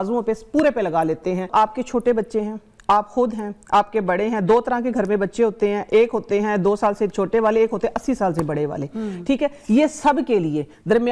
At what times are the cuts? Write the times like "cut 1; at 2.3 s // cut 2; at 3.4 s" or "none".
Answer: cut 1; at 1.5 s